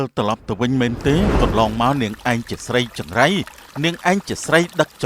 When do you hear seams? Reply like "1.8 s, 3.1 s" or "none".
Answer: 1.3 s